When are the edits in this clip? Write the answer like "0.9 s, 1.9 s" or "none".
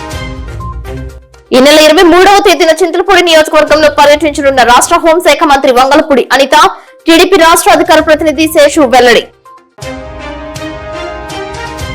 1.0 s